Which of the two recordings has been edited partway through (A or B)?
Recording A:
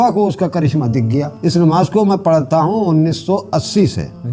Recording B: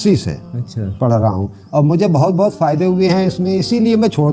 A